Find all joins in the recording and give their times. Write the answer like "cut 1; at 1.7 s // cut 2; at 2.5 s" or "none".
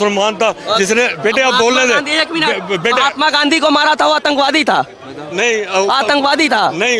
none